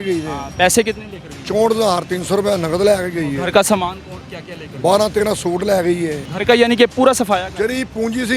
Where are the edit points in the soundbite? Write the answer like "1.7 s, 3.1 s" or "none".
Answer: 6.2 s